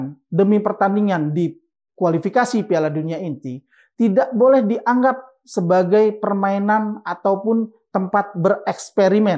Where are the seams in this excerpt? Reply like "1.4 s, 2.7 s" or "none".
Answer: none